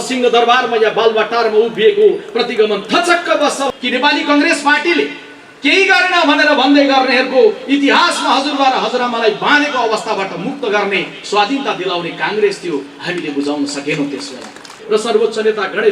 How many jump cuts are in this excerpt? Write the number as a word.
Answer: two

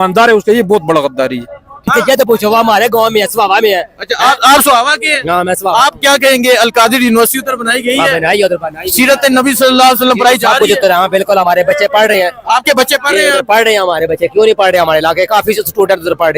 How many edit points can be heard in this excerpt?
one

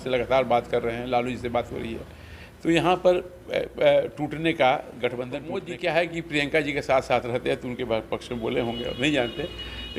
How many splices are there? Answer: one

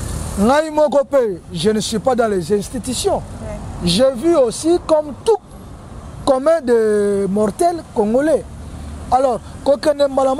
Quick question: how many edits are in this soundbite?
zero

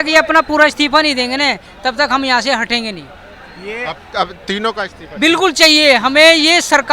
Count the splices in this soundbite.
zero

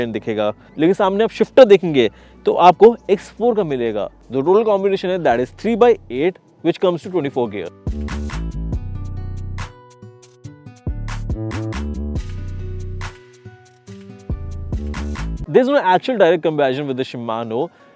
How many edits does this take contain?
zero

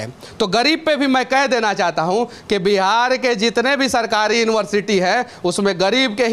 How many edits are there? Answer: zero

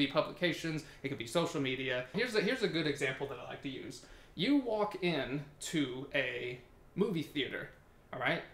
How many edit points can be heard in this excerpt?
one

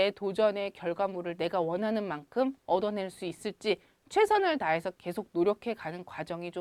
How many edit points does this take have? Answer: zero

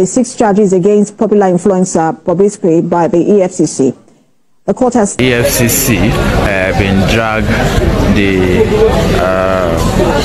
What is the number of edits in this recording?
one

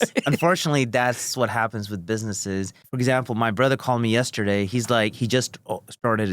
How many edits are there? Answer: one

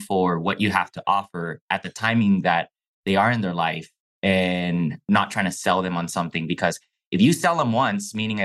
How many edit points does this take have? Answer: zero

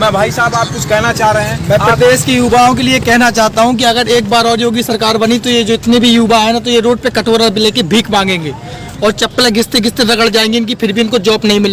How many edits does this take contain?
zero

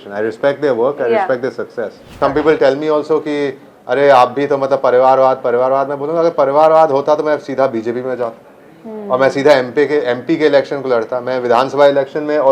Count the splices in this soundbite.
one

